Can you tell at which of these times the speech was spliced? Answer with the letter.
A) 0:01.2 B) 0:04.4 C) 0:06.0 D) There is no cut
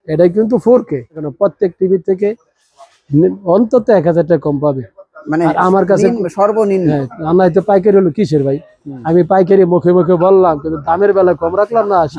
A